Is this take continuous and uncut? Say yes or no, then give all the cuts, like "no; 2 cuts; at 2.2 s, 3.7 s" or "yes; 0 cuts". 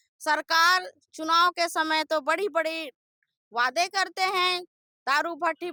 yes; 0 cuts